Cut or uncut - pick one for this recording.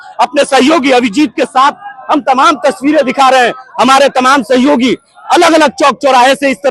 uncut